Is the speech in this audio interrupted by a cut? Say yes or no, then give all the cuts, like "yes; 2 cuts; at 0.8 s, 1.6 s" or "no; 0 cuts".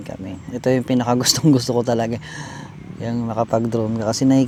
no; 0 cuts